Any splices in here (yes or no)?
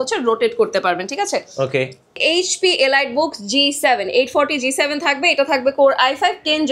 yes